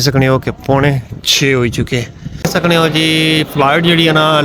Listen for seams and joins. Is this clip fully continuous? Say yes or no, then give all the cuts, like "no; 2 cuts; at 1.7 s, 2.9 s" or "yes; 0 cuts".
no; 1 cut; at 2.4 s